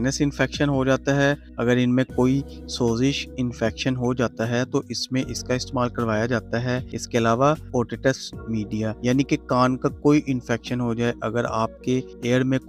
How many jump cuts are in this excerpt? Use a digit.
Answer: 0